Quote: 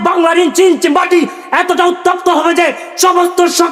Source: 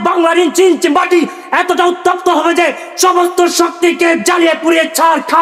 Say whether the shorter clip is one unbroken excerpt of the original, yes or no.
yes